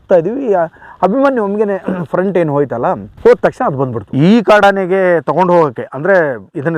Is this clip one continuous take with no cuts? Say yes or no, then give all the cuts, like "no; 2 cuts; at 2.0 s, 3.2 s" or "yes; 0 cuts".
no; 1 cut; at 4.0 s